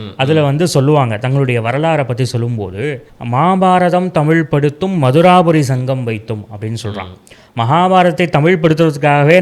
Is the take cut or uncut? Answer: cut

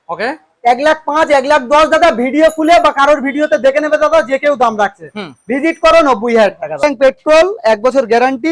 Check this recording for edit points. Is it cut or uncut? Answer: cut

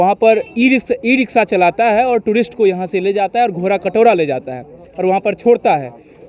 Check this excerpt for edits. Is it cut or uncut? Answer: uncut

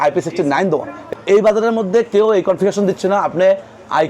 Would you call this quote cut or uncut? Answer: cut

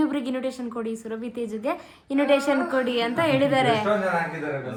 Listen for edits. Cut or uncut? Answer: uncut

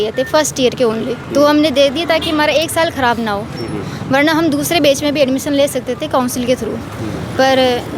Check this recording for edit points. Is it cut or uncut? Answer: uncut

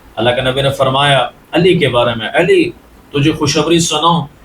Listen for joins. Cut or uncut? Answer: uncut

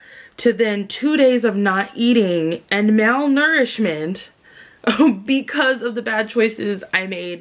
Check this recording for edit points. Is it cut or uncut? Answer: uncut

